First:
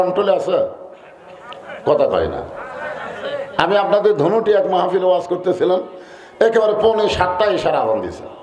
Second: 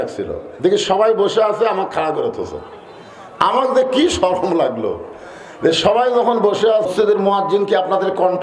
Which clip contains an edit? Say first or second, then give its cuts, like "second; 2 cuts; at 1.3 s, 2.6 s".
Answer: second; 1 cut; at 6.9 s